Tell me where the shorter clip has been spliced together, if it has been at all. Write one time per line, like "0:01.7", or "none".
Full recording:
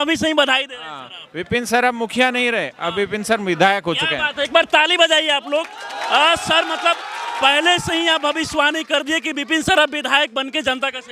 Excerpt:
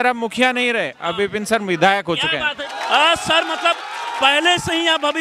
0:02.6